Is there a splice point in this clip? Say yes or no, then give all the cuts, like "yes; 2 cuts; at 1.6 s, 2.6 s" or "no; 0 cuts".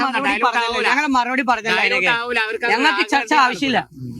yes; 1 cut; at 0.9 s